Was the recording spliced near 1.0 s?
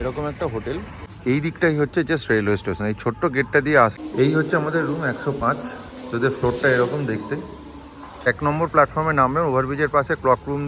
yes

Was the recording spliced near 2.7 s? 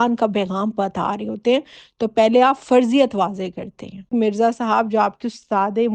no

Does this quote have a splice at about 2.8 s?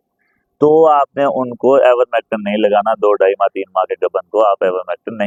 no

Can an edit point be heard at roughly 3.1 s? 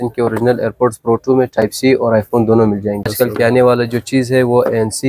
yes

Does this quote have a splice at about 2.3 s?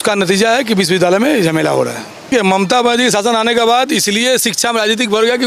yes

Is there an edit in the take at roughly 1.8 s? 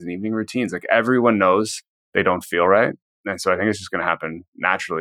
no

